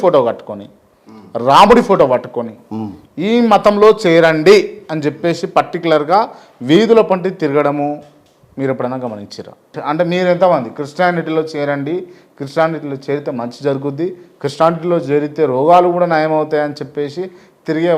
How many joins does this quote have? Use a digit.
1